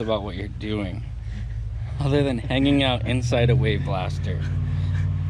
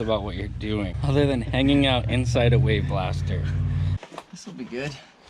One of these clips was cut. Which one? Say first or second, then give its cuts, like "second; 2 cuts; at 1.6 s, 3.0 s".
second; 2 cuts; at 0.9 s, 3.9 s